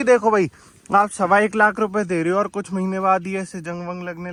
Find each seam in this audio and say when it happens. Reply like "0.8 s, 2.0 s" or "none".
none